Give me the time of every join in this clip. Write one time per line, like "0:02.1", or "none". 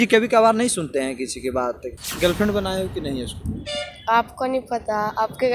0:01.9